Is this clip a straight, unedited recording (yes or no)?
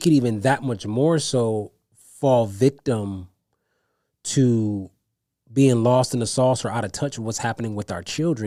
yes